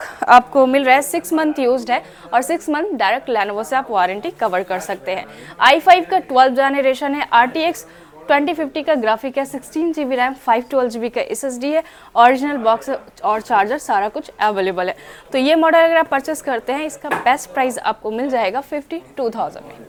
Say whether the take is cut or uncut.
uncut